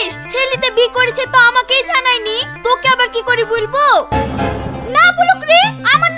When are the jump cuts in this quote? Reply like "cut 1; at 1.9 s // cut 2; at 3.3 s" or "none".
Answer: cut 1; at 4.1 s